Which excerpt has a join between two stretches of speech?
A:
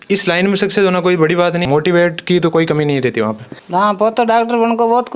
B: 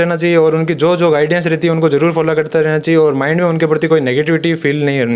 A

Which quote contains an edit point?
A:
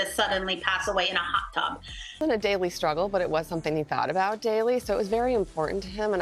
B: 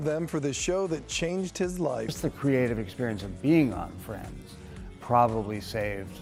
A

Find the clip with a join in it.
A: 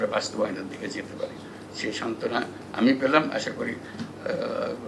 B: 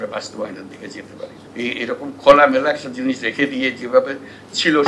B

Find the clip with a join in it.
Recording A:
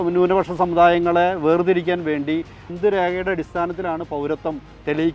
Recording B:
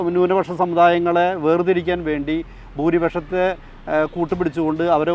A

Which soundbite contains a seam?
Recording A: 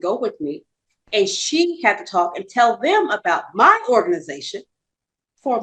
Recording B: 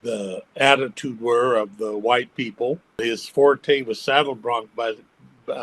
B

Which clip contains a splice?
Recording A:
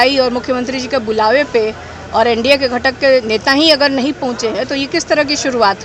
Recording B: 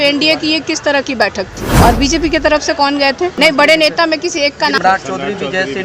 B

